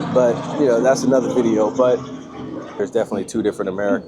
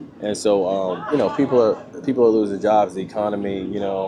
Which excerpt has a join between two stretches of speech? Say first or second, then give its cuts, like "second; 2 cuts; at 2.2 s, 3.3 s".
first; 1 cut; at 2.7 s